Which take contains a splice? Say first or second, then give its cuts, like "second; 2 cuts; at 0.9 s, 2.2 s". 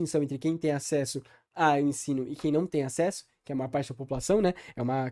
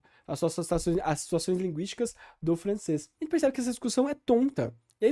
second; 1 cut; at 3.1 s